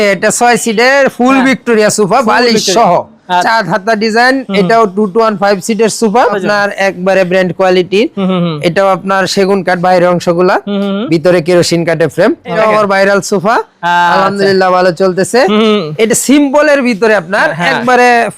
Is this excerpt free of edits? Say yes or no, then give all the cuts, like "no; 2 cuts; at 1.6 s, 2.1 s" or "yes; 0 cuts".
no; 3 cuts; at 3.4 s, 6.3 s, 12.6 s